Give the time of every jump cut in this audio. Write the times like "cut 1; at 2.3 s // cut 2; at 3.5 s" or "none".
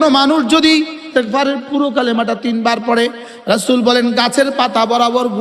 cut 1; at 1.1 s